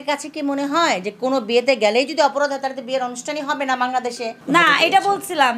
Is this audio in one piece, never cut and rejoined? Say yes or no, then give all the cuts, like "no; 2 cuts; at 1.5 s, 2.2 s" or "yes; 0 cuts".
no; 1 cut; at 4.4 s